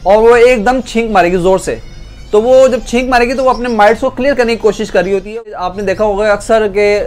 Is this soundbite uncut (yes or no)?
no